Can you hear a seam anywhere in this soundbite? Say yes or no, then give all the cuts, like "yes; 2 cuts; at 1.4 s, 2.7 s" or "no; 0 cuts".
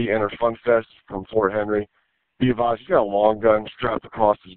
no; 0 cuts